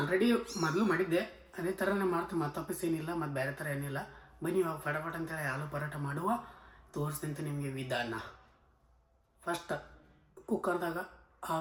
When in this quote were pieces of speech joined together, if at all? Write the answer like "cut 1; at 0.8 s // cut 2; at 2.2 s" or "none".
none

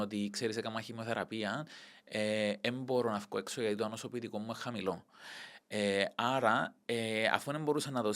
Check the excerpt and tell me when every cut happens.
none

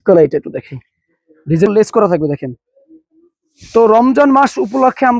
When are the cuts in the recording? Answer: cut 1; at 1.7 s

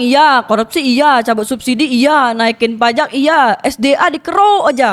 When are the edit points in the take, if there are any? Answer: none

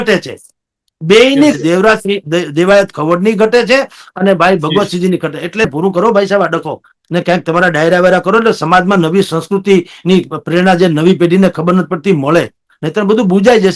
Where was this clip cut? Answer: cut 1; at 5.7 s

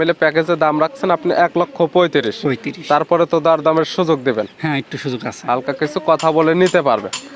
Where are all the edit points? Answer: none

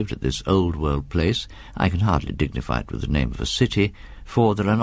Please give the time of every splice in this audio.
cut 1; at 2.2 s

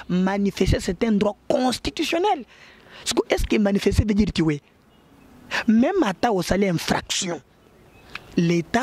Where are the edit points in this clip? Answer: none

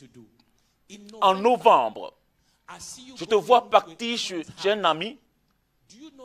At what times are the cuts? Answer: none

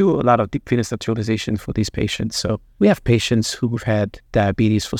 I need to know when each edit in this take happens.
cut 1; at 2.7 s

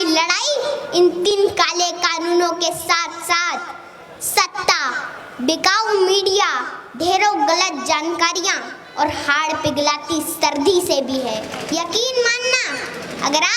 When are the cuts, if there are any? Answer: cut 1; at 1.3 s // cut 2; at 11.6 s

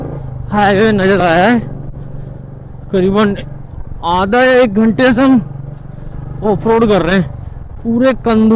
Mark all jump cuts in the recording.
none

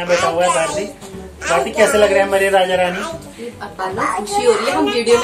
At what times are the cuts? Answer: none

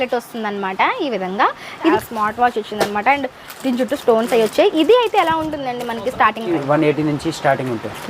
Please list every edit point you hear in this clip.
cut 1; at 1.9 s // cut 2; at 6.5 s

